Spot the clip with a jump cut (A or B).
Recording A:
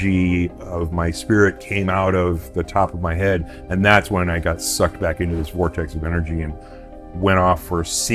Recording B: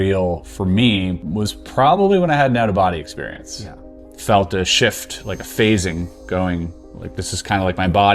B